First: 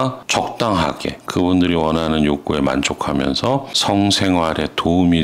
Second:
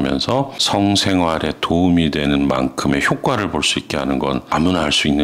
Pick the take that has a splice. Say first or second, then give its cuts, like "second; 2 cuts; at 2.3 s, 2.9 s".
first; 1 cut; at 1.2 s